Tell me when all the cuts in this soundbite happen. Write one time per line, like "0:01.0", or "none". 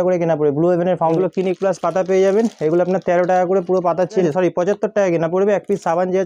0:01.2
0:04.2

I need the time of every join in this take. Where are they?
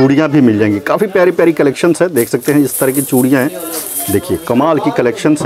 none

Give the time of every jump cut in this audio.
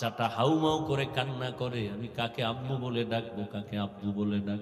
none

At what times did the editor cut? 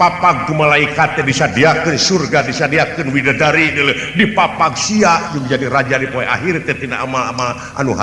none

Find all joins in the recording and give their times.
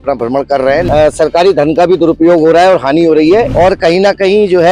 0:00.8
0:03.5

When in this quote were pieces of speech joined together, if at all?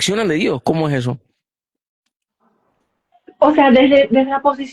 none

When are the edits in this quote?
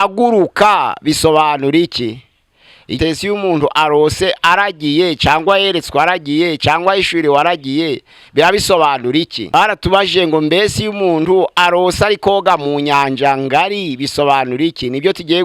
0:03.0
0:09.4

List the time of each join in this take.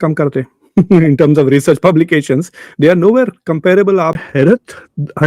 0:04.2

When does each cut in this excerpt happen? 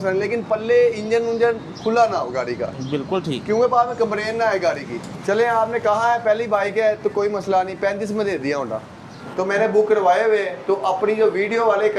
0:05.2
0:09.3

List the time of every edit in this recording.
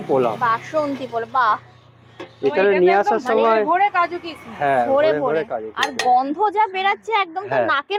none

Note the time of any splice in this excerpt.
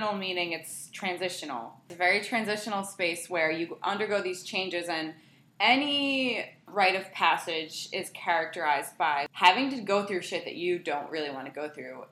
0:01.9
0:06.7
0:09.3

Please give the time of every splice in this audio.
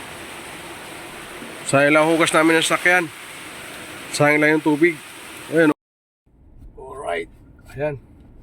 0:05.7

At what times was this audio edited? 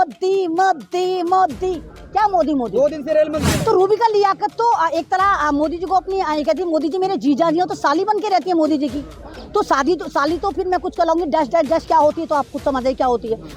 0:03.6

